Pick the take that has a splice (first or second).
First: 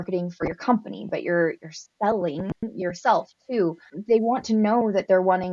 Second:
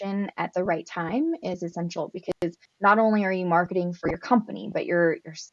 first